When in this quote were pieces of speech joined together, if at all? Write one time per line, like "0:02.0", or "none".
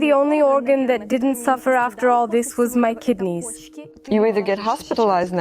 0:03.9

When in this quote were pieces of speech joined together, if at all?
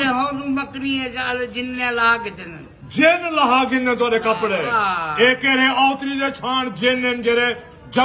none

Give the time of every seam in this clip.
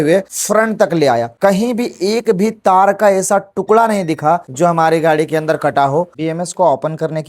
0:06.1

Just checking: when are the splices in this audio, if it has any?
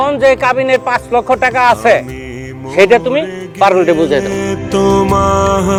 none

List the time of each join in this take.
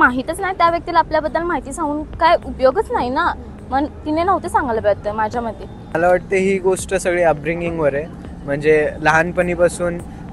0:05.9

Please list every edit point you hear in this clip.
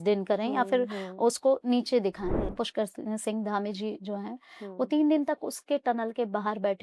0:02.5

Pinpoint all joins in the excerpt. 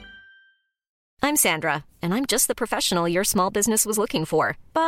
0:00.9

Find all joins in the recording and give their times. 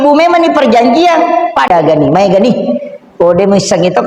0:01.7

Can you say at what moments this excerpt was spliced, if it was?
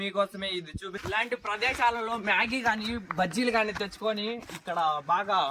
0:00.9

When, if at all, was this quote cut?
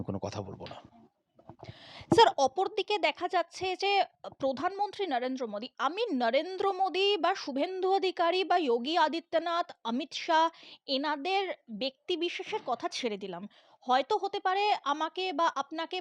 none

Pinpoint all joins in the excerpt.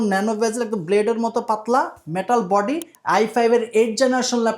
0:02.9

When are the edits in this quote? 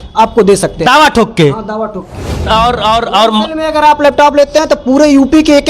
0:02.5

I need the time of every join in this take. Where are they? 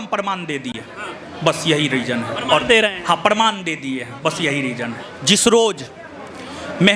none

